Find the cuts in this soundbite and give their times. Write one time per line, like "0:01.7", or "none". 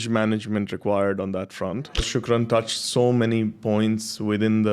0:02.1